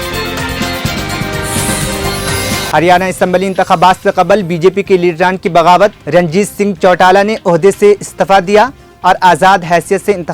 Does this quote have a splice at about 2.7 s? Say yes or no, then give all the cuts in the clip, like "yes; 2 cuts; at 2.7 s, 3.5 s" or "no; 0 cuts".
yes; 1 cut; at 2.7 s